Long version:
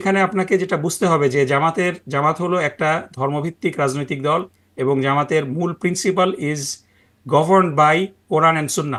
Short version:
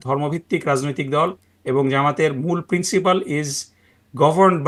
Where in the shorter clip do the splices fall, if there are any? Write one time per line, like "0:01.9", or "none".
none